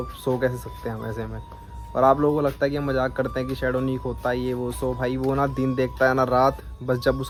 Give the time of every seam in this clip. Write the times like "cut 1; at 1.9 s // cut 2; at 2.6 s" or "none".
none